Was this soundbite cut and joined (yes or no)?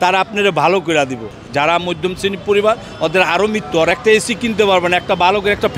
yes